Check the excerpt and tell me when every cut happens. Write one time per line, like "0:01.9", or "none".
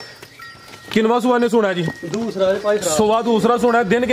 none